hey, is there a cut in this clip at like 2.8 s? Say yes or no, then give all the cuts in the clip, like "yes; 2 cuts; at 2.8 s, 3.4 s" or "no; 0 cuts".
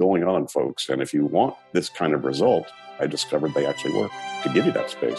yes; 3 cuts; at 1.6 s, 2.8 s, 4.4 s